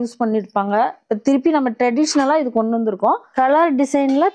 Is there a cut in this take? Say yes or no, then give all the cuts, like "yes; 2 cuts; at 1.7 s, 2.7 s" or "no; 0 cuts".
yes; 1 cut; at 3.3 s